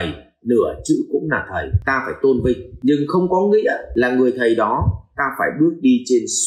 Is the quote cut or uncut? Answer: cut